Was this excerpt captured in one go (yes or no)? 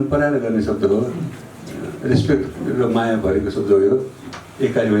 yes